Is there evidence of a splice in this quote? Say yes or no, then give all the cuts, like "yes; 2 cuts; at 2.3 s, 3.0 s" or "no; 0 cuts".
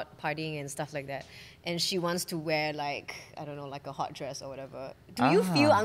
no; 0 cuts